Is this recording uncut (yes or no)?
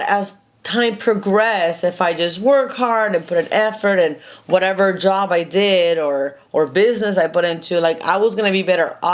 yes